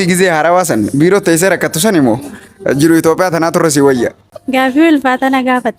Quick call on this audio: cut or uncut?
cut